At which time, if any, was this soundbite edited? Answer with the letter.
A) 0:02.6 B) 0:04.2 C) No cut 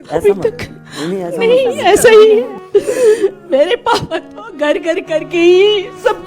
A